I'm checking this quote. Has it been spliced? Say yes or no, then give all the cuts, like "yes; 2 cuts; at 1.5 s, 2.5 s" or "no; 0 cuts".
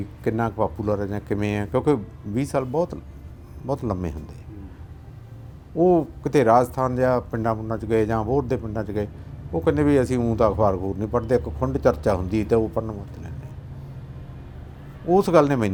no; 0 cuts